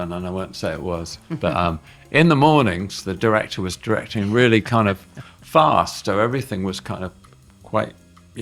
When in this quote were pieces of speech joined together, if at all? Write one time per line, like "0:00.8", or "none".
none